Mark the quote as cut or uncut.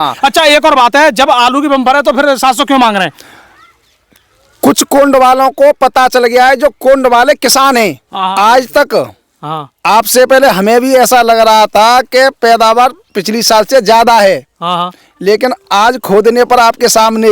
cut